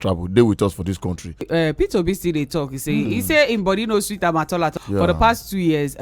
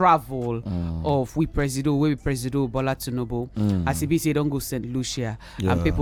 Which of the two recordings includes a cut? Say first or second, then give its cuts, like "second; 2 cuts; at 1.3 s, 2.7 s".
first; 2 cuts; at 1.4 s, 4.8 s